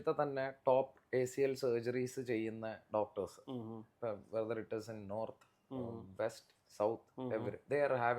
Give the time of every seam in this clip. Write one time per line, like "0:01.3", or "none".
none